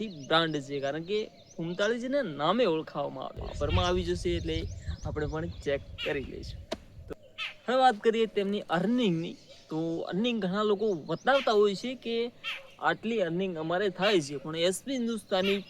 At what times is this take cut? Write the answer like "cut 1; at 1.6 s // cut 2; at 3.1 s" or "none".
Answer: cut 1; at 3.5 s